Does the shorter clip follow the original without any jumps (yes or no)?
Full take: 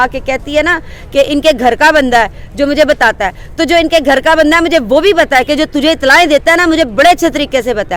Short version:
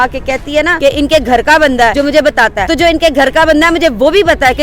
no